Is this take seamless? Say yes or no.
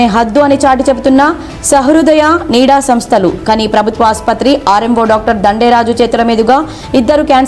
yes